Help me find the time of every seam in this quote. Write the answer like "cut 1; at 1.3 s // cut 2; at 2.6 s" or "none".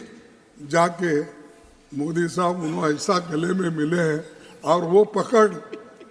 none